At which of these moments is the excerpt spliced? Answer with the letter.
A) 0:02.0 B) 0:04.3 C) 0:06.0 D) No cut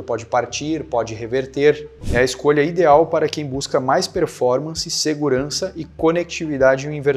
A